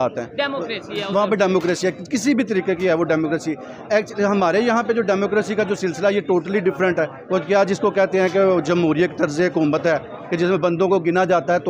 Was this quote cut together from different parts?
no; 0 cuts

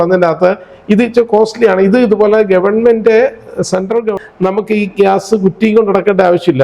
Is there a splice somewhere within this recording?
yes; 1 cut; at 4.1 s

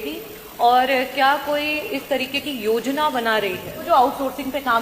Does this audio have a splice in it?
yes; 1 cut; at 3.8 s

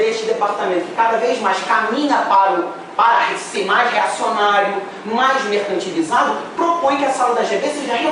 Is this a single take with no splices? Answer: yes; 0 cuts

